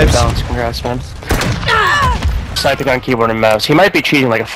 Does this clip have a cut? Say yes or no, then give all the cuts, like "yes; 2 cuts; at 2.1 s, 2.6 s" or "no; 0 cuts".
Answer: yes; 1 cut; at 2.5 s